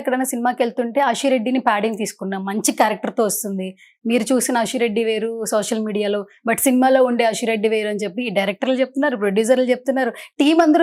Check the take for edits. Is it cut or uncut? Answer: uncut